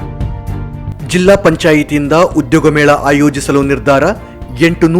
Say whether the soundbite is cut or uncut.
cut